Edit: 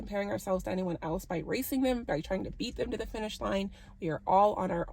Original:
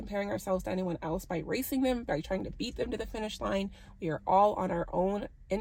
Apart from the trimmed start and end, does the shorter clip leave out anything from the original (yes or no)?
no